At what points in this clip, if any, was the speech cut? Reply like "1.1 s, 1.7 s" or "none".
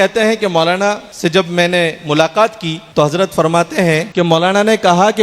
1.1 s, 2.8 s, 4.1 s